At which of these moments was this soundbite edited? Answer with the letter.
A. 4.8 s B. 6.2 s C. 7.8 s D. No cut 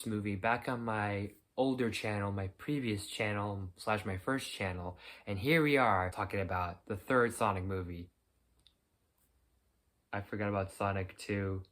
B